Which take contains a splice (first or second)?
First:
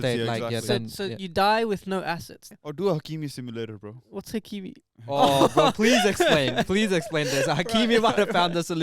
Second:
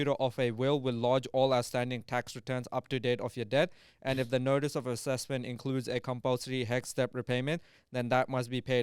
first